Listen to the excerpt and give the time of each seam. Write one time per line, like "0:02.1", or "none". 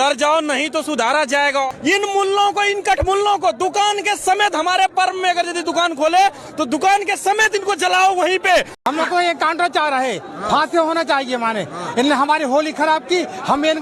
0:01.7
0:08.7